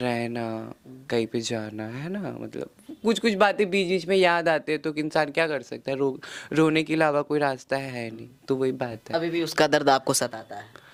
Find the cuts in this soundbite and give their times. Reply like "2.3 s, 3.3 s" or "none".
none